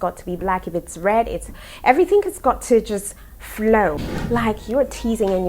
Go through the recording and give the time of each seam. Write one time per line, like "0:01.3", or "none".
0:04.1